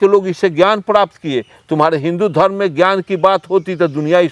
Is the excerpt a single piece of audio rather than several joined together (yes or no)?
yes